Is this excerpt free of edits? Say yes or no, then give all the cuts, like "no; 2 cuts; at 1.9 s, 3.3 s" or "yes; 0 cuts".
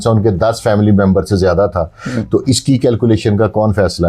yes; 0 cuts